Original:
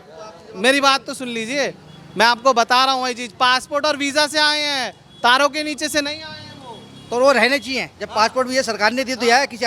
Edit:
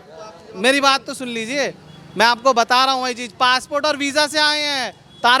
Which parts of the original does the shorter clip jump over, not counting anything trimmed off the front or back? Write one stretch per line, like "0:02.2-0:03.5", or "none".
none